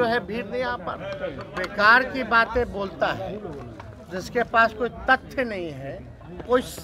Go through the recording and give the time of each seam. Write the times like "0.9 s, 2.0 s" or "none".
1.5 s